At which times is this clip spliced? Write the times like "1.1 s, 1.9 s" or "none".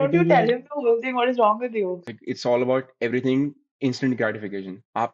2.0 s